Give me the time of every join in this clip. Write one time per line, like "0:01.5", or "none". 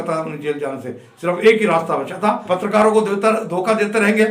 0:02.4